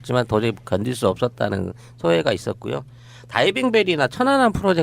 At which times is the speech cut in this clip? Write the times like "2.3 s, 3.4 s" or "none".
2.9 s